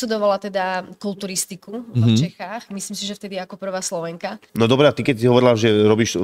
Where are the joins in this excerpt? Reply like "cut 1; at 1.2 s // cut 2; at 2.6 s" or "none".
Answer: cut 1; at 4.4 s

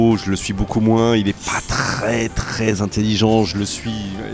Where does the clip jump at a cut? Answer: none

